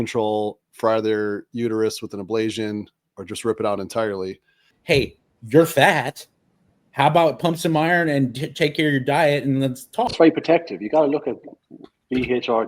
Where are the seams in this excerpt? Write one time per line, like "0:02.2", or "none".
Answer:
0:04.7
0:10.1

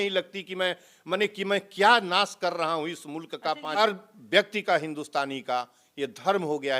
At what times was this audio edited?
0:03.6

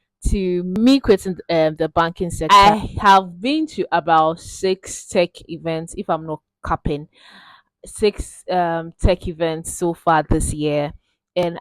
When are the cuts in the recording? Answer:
0:02.4

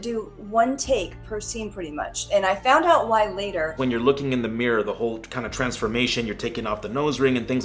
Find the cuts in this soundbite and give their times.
0:03.8

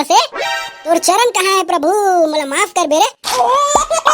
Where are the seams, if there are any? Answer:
0:03.2

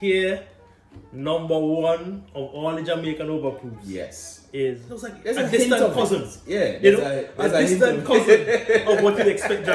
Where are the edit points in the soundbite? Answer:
0:04.9

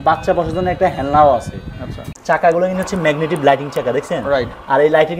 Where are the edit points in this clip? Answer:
0:02.1

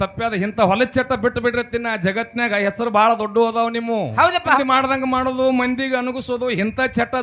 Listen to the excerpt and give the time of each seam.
0:04.6

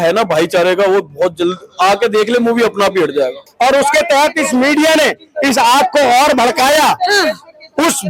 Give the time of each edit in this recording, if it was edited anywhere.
0:03.4

